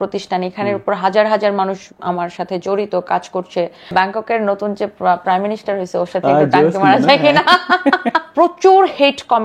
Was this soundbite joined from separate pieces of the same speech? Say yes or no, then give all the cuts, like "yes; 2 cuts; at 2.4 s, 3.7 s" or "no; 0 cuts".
yes; 2 cuts; at 3.9 s, 8.2 s